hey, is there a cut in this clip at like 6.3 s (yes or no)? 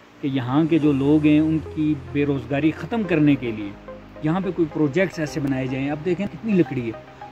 yes